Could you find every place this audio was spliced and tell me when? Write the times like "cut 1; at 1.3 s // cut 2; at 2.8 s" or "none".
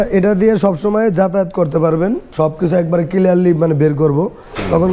cut 1; at 2.3 s